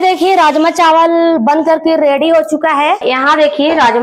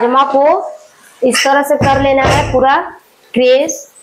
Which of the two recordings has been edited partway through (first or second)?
first